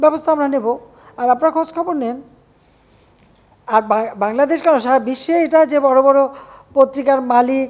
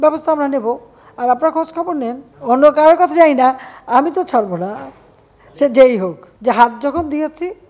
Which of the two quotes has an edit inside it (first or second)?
second